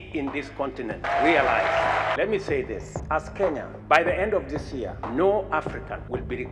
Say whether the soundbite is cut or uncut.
cut